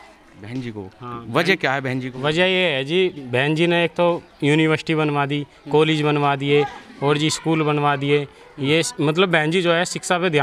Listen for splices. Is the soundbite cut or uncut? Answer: uncut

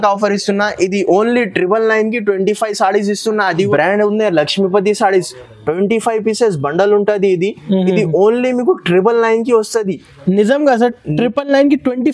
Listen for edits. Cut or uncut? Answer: cut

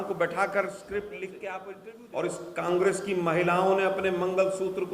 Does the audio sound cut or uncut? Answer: cut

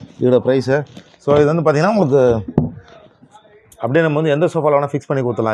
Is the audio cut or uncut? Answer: uncut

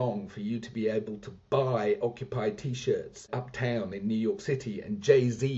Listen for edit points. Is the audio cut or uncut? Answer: cut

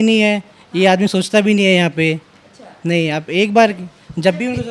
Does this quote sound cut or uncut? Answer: uncut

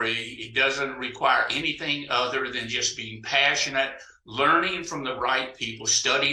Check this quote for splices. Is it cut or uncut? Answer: uncut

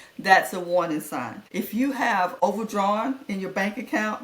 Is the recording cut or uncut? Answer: cut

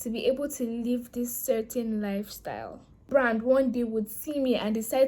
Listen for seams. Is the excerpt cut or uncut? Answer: cut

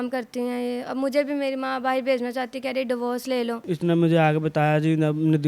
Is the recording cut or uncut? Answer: cut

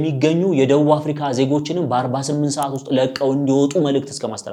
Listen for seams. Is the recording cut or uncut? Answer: uncut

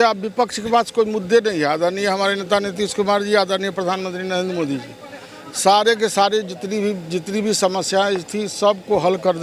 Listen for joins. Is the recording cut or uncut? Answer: uncut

